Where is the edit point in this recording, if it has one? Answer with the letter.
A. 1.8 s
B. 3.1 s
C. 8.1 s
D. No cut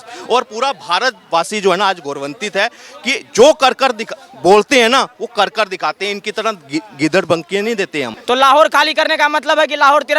C